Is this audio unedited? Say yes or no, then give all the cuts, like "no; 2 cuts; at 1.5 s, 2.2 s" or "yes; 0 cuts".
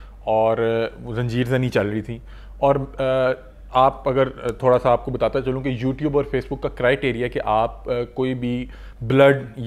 yes; 0 cuts